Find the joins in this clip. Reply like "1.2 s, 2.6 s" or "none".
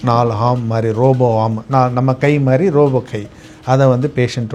none